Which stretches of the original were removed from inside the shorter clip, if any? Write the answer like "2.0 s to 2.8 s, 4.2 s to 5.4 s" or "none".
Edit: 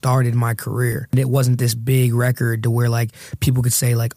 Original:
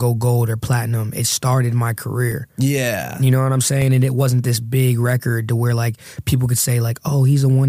2.5 s to 4.0 s